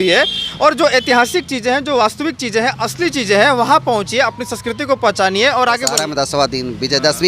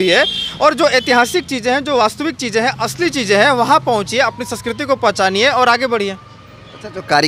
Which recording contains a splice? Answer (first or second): first